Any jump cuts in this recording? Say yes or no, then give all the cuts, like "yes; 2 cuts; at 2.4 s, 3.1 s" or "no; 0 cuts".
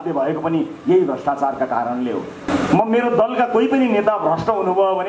yes; 1 cut; at 2.5 s